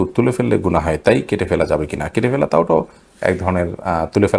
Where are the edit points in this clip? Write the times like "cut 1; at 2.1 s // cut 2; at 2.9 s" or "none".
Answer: none